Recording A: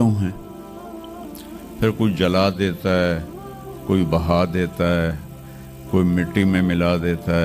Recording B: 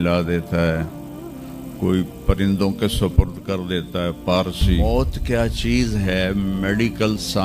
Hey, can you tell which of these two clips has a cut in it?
B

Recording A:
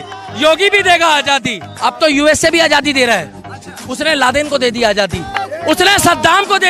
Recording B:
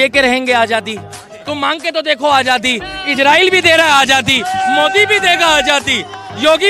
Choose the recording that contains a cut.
A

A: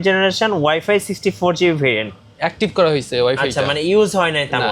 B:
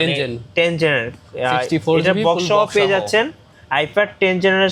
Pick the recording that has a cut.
A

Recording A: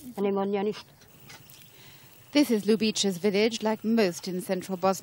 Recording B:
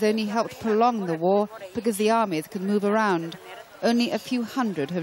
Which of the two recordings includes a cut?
B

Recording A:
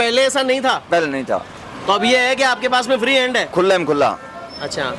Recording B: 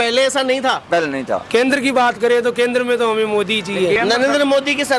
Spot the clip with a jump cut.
B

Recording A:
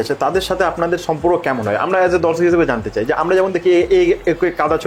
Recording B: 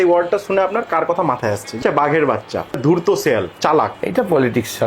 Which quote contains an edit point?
B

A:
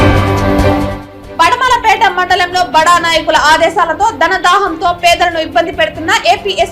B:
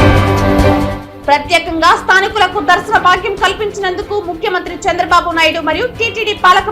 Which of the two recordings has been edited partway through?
B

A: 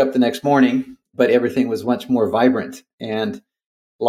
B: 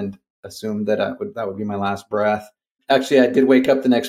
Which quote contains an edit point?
B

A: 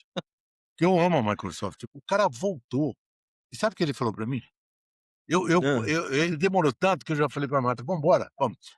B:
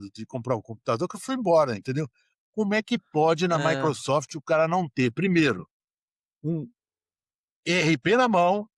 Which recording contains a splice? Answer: A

